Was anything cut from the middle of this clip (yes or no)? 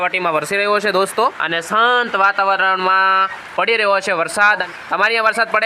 yes